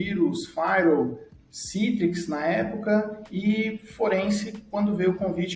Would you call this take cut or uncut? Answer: uncut